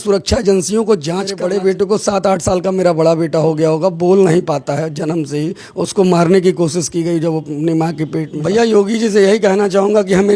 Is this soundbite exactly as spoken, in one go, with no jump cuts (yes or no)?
no